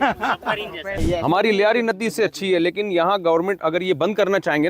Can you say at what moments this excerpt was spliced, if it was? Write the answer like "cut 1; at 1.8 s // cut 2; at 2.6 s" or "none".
cut 1; at 1.0 s